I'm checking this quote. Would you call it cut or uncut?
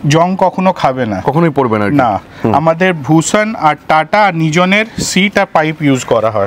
uncut